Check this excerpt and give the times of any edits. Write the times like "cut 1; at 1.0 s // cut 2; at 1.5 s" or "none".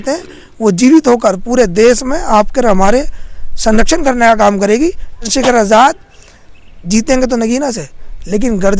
cut 1; at 5.3 s

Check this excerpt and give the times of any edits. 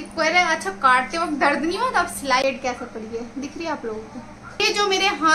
cut 1; at 2.4 s // cut 2; at 4.6 s

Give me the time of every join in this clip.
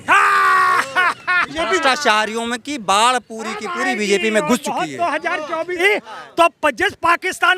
cut 1; at 5.7 s

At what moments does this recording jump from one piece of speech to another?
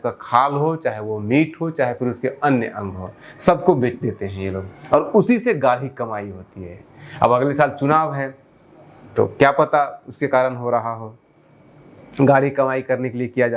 none

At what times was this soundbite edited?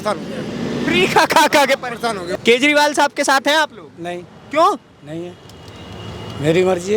cut 1; at 2.2 s

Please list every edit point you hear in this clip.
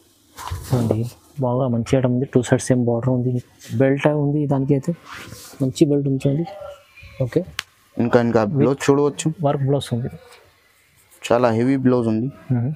cut 1; at 3.7 s

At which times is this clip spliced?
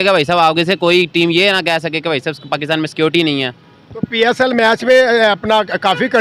none

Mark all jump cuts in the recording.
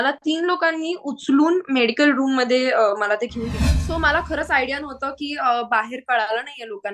cut 1; at 3.8 s

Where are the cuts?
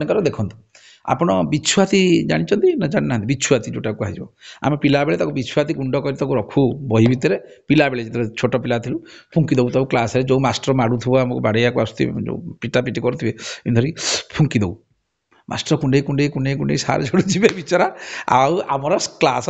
none

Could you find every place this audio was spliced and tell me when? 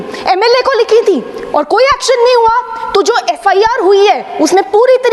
none

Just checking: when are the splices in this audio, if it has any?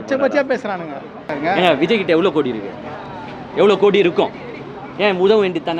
cut 1; at 1.2 s

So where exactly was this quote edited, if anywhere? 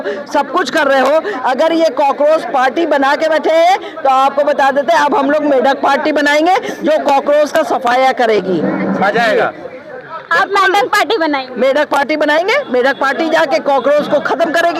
none

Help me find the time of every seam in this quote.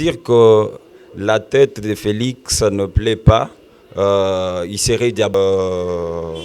cut 1; at 5.3 s

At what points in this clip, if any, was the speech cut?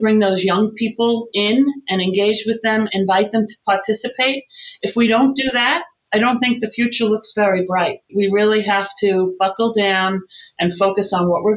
cut 1; at 2.9 s // cut 2; at 8.1 s

